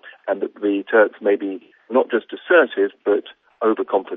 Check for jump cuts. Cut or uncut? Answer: uncut